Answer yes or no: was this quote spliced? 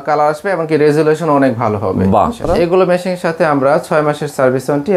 yes